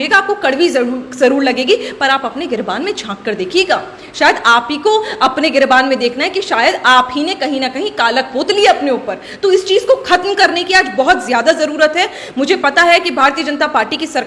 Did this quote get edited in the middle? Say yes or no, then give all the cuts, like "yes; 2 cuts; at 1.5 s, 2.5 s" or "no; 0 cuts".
no; 0 cuts